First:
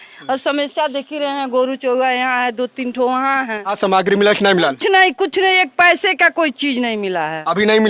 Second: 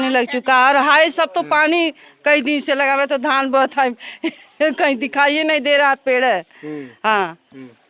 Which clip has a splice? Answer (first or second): first